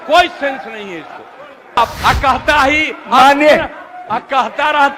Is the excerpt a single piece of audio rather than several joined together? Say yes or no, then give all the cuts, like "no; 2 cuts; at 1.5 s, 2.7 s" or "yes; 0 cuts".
no; 1 cut; at 1.8 s